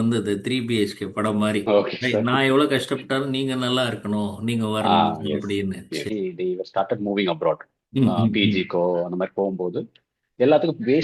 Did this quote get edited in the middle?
yes; 2 cuts; at 1.6 s, 6.1 s

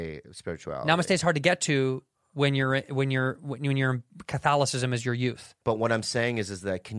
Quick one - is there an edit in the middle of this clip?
yes; 1 cut; at 5.5 s

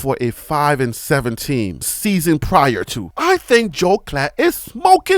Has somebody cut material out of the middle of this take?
yes; 1 cut; at 3.2 s

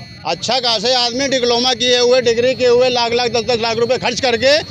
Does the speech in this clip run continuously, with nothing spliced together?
yes; 0 cuts

